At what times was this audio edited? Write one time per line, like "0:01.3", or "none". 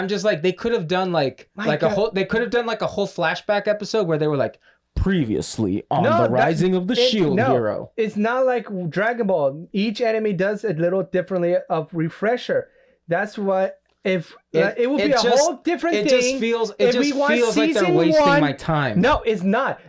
none